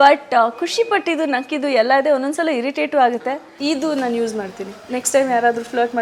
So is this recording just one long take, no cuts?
no; 1 cut; at 3.5 s

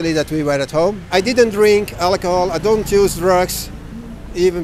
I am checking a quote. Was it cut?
yes; 1 cut; at 1.1 s

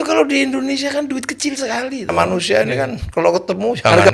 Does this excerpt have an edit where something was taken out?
yes; 1 cut; at 2.1 s

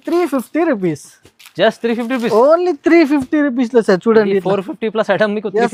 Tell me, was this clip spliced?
no; 0 cuts

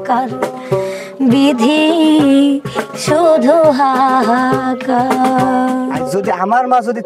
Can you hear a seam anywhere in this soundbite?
yes; 1 cut; at 6.0 s

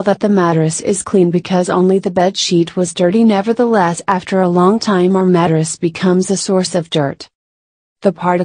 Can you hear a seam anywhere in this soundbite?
no; 0 cuts

